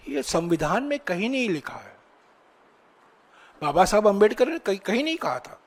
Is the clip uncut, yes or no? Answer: yes